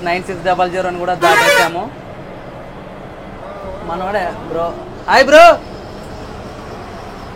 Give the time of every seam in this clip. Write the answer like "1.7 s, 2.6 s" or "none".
none